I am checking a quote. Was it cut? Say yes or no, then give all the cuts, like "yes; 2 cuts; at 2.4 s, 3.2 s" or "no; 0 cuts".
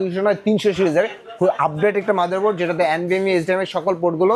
no; 0 cuts